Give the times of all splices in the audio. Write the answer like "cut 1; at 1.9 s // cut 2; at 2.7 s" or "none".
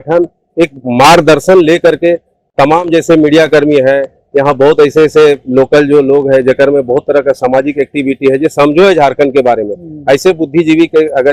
none